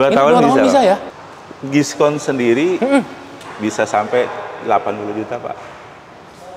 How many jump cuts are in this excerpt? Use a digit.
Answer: 1